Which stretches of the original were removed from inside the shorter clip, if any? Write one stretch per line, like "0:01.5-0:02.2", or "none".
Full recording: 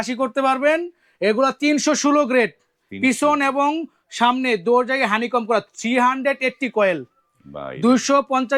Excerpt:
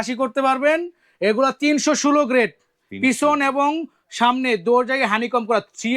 none